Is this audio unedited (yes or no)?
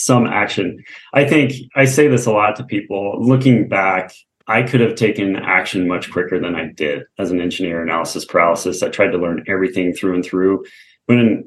no